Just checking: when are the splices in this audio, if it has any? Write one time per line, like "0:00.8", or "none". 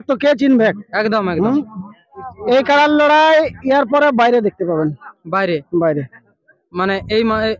0:02.3